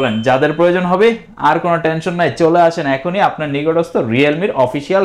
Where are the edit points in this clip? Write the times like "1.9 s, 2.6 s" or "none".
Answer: none